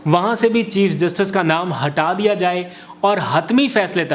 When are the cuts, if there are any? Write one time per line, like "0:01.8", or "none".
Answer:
none